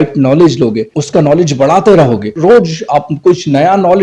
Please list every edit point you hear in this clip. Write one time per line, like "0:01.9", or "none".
0:00.9
0:02.3